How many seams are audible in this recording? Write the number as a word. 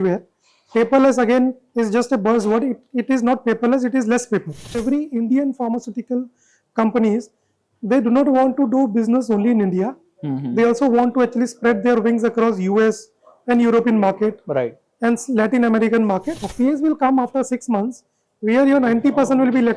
two